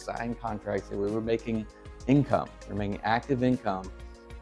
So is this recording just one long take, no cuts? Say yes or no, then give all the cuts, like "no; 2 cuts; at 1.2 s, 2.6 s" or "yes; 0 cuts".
yes; 0 cuts